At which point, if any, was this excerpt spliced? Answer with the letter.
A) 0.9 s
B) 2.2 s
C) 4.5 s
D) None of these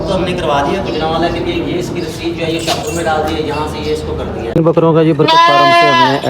C